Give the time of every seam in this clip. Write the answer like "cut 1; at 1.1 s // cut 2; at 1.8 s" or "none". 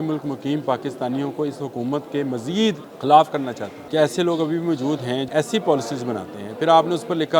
cut 1; at 2.9 s // cut 2; at 3.7 s // cut 3; at 5.3 s